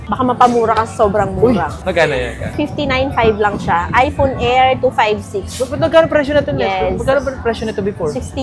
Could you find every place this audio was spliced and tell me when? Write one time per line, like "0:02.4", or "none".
none